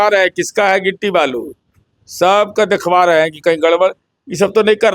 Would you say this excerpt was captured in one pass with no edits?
yes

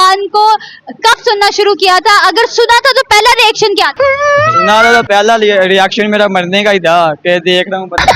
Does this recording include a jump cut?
no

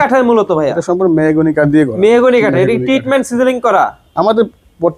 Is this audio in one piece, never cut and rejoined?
yes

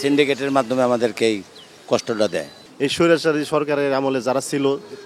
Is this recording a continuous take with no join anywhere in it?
no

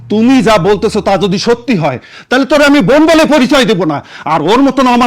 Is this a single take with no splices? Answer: yes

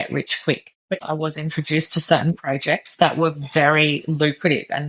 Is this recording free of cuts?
no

